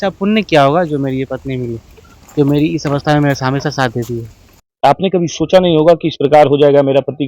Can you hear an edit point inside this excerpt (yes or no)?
yes